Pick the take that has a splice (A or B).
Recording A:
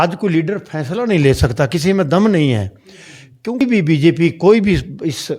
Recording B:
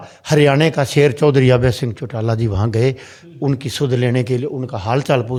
A